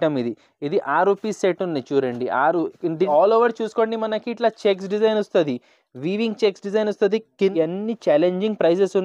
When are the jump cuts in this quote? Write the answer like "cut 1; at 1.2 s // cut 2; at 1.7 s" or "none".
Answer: cut 1; at 3.1 s // cut 2; at 7.5 s